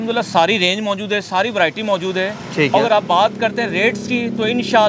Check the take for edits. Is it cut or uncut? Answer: uncut